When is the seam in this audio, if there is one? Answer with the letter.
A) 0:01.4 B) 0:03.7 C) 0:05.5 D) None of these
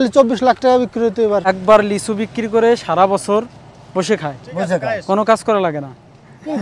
A